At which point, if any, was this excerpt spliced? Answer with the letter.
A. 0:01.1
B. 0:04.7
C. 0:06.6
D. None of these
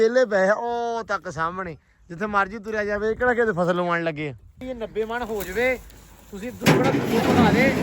B